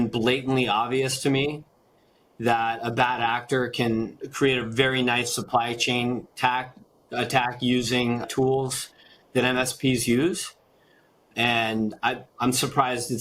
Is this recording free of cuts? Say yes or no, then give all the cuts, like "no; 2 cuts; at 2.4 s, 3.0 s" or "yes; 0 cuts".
yes; 0 cuts